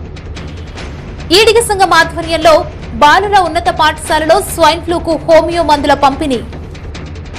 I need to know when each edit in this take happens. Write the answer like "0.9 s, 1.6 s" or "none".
1.3 s, 6.5 s